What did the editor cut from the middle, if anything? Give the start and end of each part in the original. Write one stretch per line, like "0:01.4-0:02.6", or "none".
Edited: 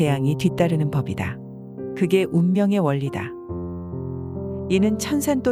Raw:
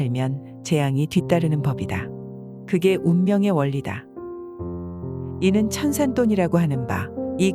none